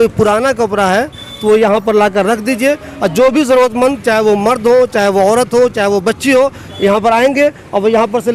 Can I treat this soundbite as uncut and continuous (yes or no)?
yes